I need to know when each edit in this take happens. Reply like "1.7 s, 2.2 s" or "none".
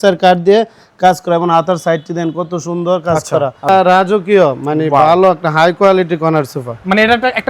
3.7 s